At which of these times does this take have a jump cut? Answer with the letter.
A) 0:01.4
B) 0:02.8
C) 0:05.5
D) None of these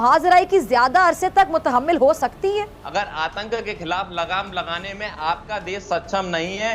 B